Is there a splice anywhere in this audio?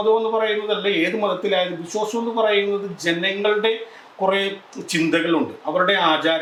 no; 0 cuts

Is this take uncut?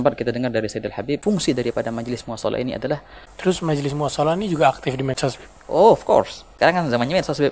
no; 4 cuts; at 1.2 s, 3.2 s, 5.2 s, 6.4 s

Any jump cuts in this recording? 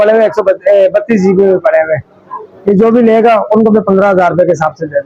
no; 0 cuts

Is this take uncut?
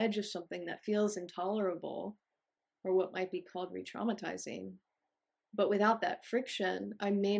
yes; 0 cuts

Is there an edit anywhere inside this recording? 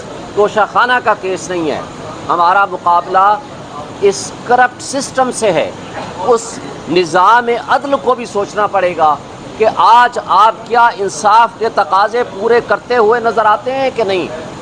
no; 0 cuts

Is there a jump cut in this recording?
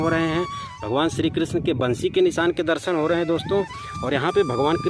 no; 0 cuts

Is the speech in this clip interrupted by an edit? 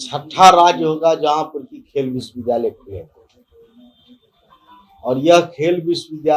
no; 0 cuts

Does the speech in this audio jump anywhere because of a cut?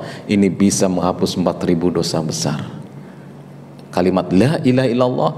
no; 0 cuts

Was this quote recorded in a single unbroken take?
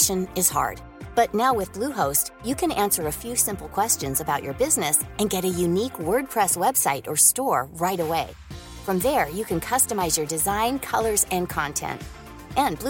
yes; 0 cuts

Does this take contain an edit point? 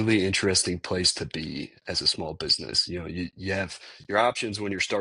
no; 0 cuts

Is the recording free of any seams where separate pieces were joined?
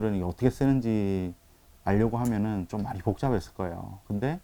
yes; 0 cuts

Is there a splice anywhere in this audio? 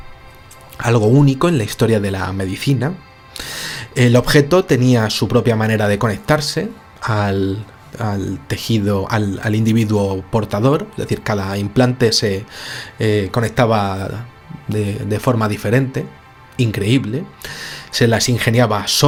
no; 0 cuts

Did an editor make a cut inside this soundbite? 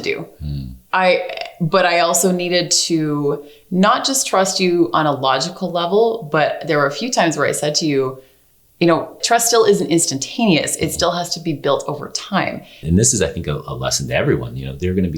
yes; 2 cuts; at 9.2 s, 12.8 s

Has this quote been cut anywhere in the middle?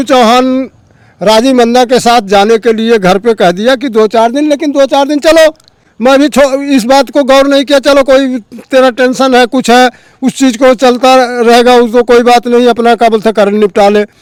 no; 0 cuts

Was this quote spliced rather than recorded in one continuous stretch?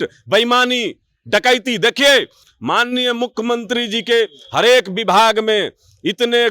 no; 0 cuts

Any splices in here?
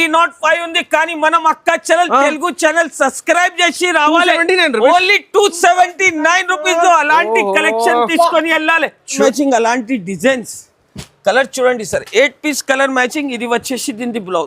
yes; 1 cut; at 9.2 s

